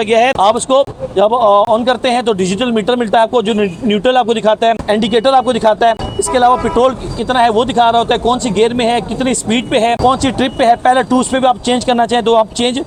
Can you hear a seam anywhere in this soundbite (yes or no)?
no